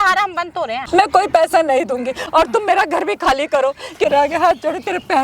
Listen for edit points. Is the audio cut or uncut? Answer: cut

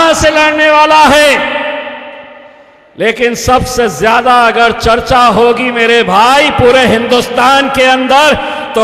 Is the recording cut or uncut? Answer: uncut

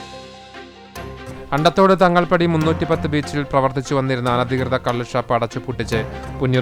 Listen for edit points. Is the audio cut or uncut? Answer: cut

